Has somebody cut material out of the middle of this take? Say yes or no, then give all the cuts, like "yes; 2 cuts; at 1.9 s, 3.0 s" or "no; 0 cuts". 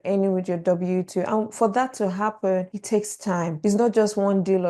no; 0 cuts